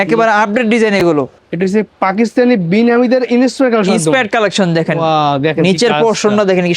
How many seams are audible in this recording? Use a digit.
1